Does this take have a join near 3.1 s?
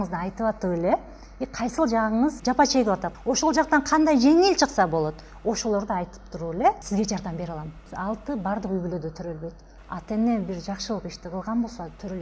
yes; 3 cuts; at 2.4 s, 3.1 s, 7.4 s

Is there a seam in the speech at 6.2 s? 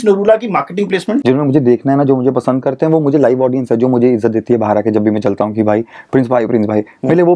no; 1 cut; at 1.2 s

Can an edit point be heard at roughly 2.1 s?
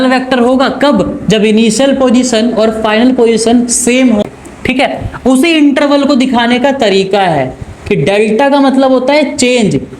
no; 1 cut; at 4.2 s

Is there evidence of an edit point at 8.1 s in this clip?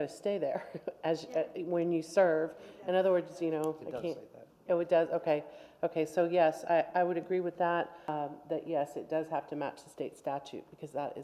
yes; 1 cut; at 8.1 s

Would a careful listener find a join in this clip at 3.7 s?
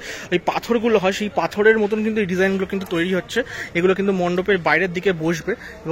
no; 0 cuts

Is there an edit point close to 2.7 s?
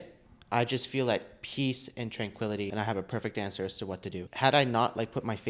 yes; 2 cuts; at 2.7 s, 4.2 s

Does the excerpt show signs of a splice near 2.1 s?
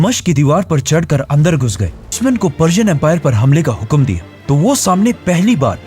yes; 1 cut; at 2.1 s

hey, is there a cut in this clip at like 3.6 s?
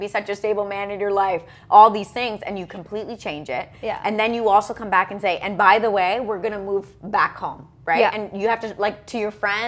no; 0 cuts

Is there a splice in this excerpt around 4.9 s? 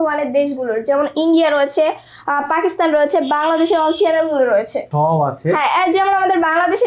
yes; 1 cut; at 4.9 s

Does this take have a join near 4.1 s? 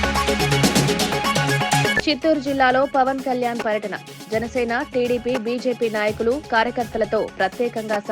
no; 1 cut; at 1.9 s

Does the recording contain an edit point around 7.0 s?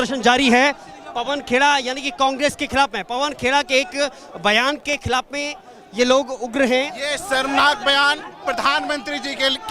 yes; 1 cut; at 7.0 s

